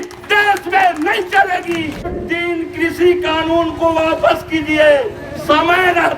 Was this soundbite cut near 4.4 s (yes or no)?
no